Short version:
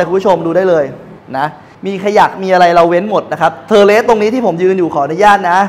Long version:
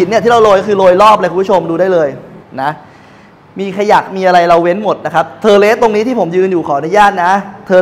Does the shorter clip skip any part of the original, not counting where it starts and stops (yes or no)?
yes